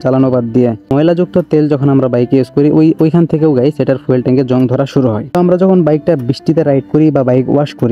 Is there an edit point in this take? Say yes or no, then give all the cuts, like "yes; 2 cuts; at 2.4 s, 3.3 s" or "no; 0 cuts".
yes; 2 cuts; at 0.9 s, 5.2 s